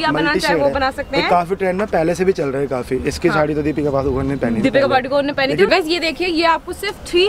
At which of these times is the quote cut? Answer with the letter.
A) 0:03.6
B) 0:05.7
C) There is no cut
B